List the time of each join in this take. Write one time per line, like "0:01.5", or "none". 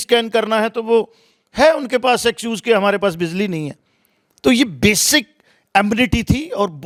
none